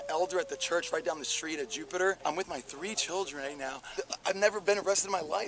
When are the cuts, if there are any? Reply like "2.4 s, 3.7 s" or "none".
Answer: 2.2 s, 3.9 s